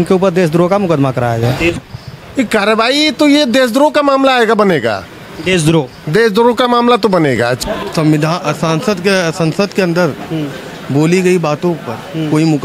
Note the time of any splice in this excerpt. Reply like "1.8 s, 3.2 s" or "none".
1.8 s, 7.6 s